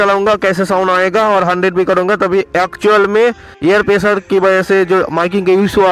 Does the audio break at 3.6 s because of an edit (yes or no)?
no